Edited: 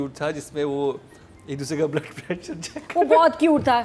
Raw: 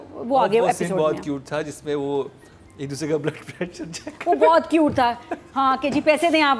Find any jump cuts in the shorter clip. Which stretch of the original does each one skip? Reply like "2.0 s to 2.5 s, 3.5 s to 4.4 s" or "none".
none